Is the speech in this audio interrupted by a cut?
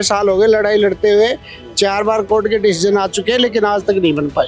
no; 0 cuts

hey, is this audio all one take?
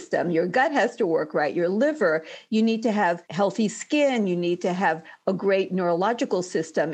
yes; 0 cuts

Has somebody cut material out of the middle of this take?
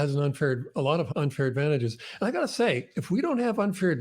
yes; 1 cut; at 1.1 s

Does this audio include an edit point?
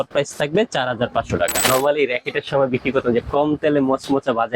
yes; 1 cut; at 1.6 s

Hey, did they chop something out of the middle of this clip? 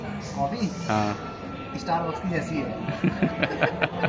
no; 0 cuts

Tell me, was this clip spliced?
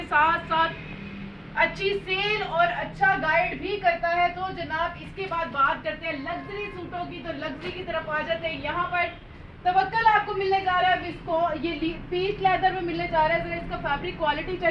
no; 0 cuts

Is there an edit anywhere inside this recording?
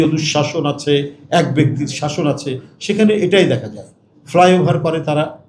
no; 0 cuts

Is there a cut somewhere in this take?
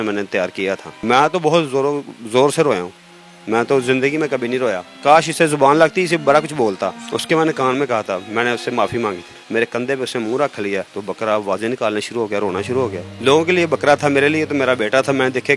yes; 5 cuts; at 0.9 s, 4.9 s, 7.1 s, 9.4 s, 13.0 s

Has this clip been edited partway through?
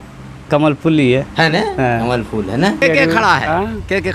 yes; 1 cut; at 2.8 s

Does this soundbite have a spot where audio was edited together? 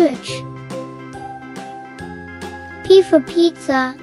no; 0 cuts

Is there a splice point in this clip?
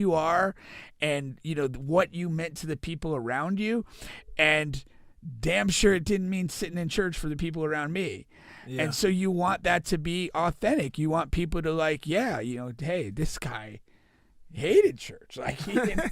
no; 0 cuts

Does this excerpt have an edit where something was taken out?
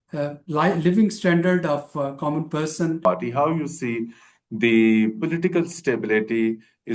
yes; 1 cut; at 3.0 s

